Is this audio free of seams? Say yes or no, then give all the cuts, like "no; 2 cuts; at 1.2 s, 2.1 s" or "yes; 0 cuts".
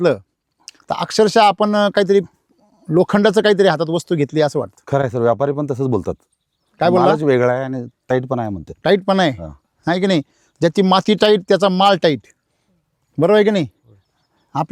yes; 0 cuts